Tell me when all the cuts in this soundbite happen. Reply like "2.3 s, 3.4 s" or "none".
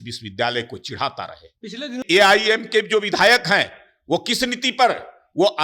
2.0 s